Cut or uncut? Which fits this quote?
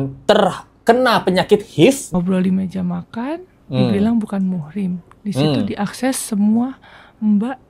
cut